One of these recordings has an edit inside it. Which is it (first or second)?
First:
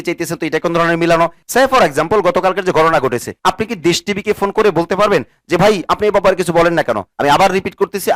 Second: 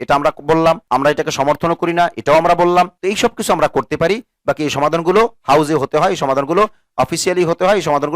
first